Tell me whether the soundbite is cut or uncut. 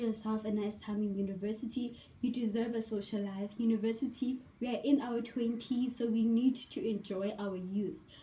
uncut